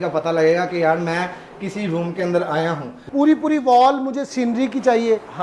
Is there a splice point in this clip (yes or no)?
yes